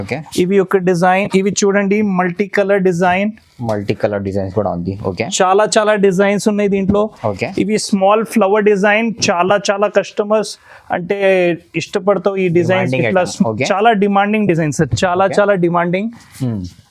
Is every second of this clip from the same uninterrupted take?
yes; 0 cuts

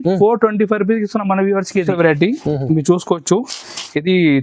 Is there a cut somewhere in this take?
yes; 1 cut; at 1.9 s

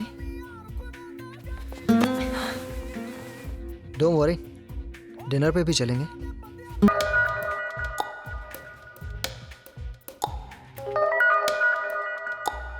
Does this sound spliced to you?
yes; 1 cut; at 6.9 s

